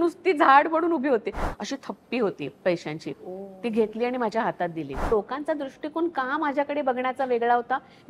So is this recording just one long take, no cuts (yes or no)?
no